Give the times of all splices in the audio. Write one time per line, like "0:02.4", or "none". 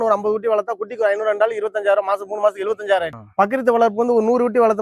0:03.2